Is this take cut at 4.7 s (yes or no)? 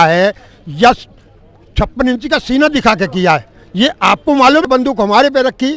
yes